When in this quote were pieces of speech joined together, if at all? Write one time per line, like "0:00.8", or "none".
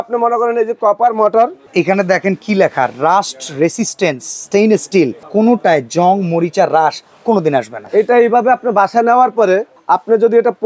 0:01.7
0:05.2
0:07.8